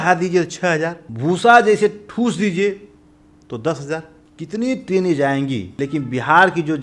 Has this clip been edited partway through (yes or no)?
yes